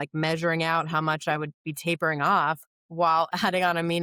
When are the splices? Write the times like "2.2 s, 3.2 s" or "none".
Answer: none